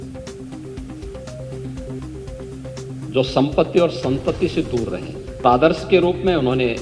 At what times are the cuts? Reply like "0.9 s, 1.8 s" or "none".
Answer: 1.4 s, 3.1 s, 5.4 s